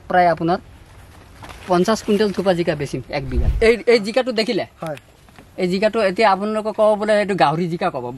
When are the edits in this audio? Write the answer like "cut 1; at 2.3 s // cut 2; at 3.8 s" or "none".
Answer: cut 1; at 3.4 s